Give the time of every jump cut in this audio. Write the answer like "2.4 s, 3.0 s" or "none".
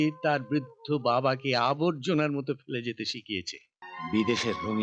3.7 s